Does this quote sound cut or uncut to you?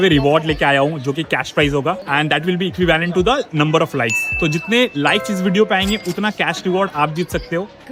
uncut